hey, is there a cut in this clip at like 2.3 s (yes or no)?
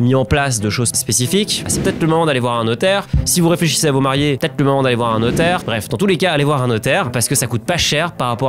no